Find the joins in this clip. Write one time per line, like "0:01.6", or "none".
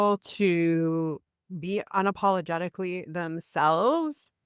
none